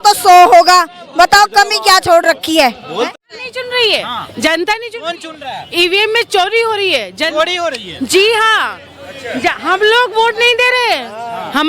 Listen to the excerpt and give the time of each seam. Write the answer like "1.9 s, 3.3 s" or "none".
3.1 s